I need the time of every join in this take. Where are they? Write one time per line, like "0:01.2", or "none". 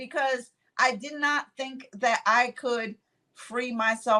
none